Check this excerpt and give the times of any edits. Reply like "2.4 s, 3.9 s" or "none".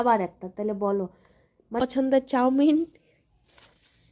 1.8 s